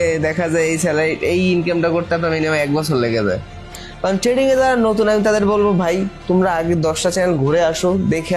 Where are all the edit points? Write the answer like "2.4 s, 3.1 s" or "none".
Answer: 3.8 s